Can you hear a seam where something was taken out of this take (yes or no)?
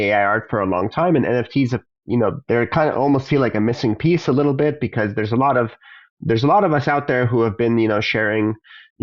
no